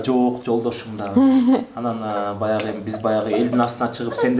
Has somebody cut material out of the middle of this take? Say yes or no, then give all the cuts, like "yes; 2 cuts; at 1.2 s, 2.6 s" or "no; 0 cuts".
no; 0 cuts